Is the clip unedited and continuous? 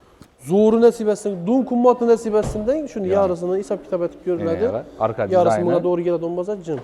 yes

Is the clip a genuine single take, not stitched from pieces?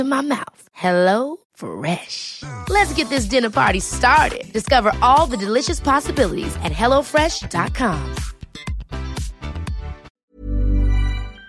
no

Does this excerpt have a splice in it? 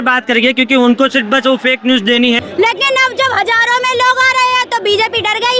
yes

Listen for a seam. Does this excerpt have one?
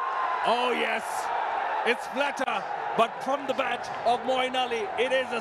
no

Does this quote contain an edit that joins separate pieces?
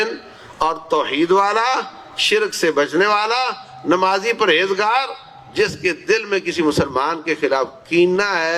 no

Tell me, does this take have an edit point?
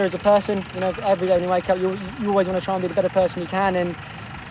no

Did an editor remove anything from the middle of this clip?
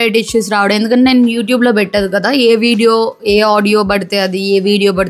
no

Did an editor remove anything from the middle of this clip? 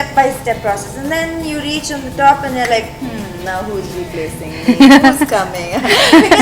no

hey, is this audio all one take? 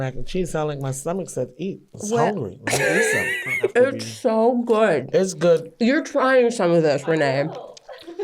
no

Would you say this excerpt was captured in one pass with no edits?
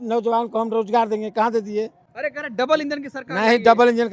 no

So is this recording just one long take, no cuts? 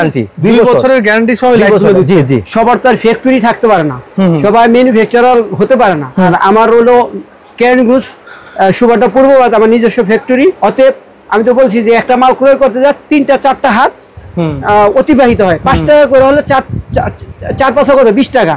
no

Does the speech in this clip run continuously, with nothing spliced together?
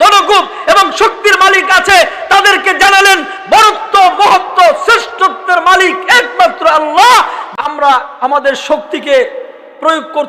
no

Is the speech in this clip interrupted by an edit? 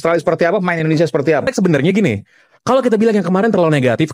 yes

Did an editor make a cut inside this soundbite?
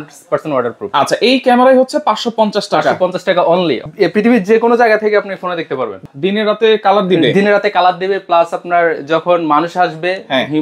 yes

